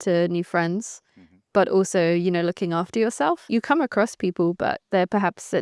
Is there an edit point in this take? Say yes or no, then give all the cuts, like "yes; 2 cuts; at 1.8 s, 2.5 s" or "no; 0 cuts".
yes; 1 cut; at 3.4 s